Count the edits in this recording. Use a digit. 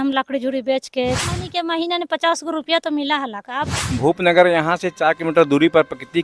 2